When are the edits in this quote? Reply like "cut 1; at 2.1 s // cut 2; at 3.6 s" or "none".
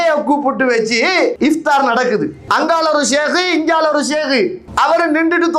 cut 1; at 1.4 s // cut 2; at 2.4 s // cut 3; at 4.6 s